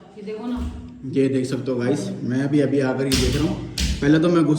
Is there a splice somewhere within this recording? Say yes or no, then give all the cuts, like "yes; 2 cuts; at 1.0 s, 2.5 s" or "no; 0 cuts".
no; 0 cuts